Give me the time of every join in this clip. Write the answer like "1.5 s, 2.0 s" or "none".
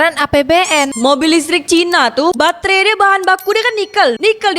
0.9 s, 2.4 s